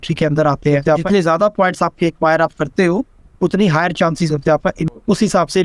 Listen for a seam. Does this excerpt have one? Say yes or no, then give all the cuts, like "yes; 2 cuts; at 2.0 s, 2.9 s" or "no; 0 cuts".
yes; 1 cut; at 1.0 s